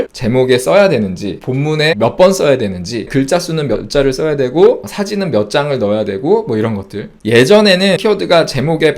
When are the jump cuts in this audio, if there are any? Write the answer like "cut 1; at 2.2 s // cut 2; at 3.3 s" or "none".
cut 1; at 1.8 s // cut 2; at 3.1 s // cut 3; at 7.2 s // cut 4; at 8.0 s